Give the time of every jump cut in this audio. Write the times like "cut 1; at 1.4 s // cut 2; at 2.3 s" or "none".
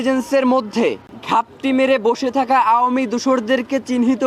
cut 1; at 1.1 s